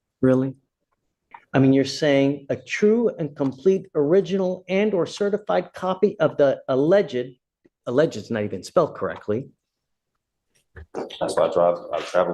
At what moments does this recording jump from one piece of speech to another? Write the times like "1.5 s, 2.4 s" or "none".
1.3 s, 10.0 s